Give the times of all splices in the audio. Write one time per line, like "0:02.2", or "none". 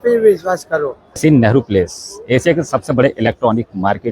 0:01.0